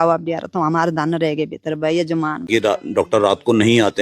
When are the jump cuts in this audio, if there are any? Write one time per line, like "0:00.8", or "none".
0:02.5